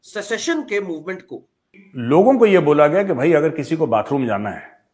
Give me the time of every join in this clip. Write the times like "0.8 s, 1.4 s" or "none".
1.8 s